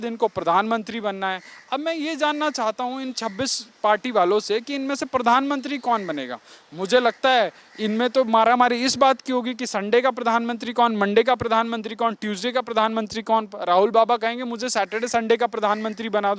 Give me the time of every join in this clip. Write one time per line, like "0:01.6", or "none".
none